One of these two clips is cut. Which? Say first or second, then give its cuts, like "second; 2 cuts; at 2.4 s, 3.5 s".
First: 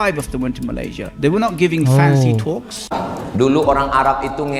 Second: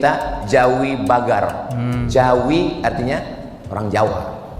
first; 1 cut; at 2.8 s